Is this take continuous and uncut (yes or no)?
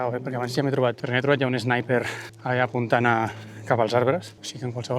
no